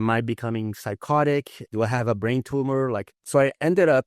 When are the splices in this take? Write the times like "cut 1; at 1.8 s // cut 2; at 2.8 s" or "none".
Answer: cut 1; at 1.6 s // cut 2; at 3.1 s